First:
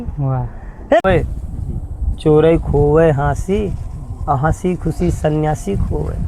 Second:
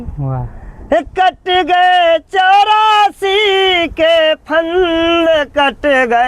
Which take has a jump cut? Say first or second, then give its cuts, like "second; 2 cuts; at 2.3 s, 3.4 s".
first; 1 cut; at 1.0 s